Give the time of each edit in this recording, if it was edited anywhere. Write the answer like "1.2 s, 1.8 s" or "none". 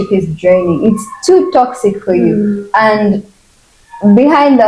none